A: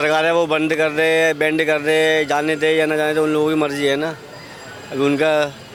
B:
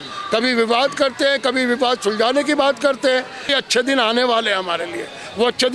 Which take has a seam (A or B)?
B